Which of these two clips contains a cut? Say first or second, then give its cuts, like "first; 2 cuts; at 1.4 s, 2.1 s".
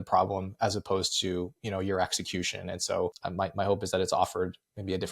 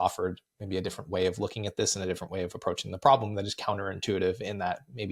first; 1 cut; at 3.2 s